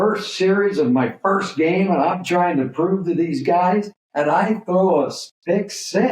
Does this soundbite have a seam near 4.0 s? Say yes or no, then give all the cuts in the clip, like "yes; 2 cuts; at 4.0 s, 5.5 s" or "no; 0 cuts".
yes; 1 cut; at 4.0 s